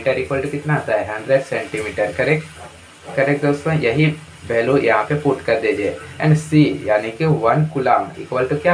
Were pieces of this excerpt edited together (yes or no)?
no